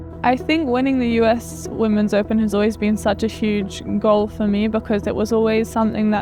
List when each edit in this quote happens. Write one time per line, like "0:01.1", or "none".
none